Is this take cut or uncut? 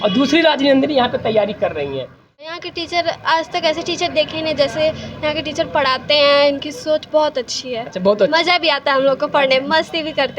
cut